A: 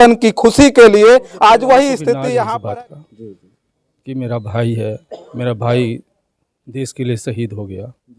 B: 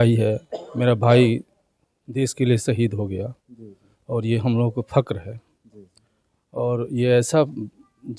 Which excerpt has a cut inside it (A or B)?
A